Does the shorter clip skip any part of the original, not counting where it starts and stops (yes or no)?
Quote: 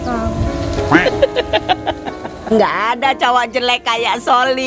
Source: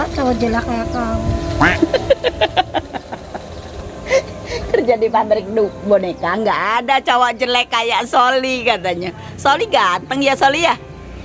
yes